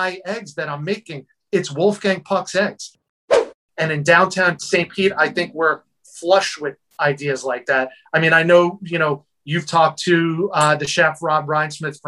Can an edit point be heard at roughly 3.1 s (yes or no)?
yes